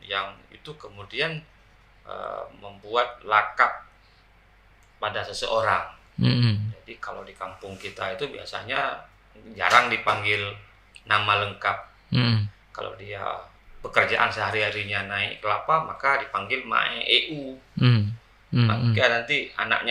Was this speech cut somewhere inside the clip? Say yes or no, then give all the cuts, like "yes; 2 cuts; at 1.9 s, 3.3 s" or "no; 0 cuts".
yes; 1 cut; at 13.6 s